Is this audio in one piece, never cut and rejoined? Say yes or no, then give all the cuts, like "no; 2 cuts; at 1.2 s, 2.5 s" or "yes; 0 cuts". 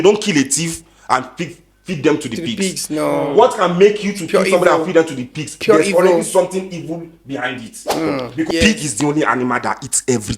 no; 1 cut; at 8.5 s